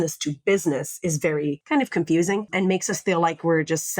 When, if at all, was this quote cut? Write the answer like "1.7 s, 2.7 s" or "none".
1.6 s, 2.5 s